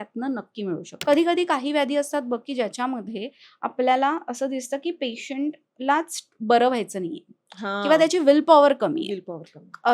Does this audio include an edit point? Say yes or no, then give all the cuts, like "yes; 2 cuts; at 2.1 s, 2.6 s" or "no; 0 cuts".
yes; 1 cut; at 0.9 s